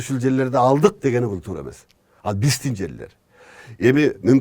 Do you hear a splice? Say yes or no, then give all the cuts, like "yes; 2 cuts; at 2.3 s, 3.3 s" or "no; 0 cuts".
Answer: no; 0 cuts